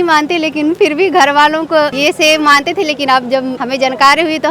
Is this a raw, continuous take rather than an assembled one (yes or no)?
no